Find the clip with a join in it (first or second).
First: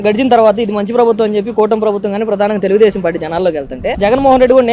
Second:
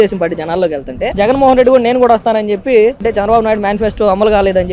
second